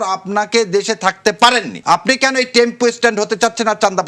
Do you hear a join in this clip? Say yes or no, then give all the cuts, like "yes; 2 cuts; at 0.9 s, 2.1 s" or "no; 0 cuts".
yes; 1 cut; at 1.7 s